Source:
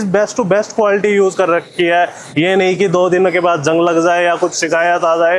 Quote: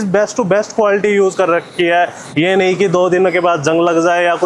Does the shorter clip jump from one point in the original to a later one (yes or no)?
no